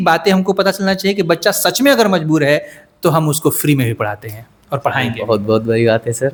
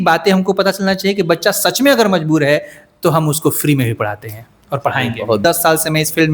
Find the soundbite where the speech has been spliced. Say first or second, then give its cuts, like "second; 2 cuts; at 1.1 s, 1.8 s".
second; 1 cut; at 5.4 s